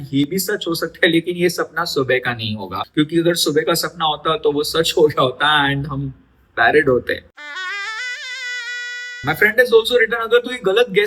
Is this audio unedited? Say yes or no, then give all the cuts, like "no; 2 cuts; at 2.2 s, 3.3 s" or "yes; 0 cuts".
no; 3 cuts; at 2.8 s, 7.3 s, 8.7 s